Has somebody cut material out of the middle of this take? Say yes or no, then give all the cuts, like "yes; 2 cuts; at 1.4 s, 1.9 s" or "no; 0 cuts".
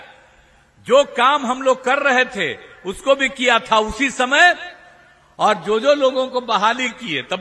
no; 0 cuts